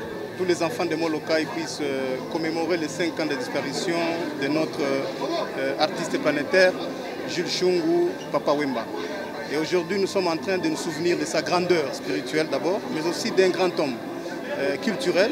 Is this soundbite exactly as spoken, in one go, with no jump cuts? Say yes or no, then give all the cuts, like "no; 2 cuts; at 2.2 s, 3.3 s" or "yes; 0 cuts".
yes; 0 cuts